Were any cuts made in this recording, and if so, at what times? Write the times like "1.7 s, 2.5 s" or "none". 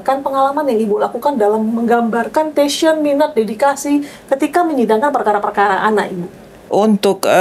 none

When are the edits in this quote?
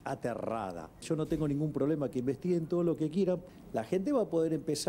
1.0 s, 3.5 s

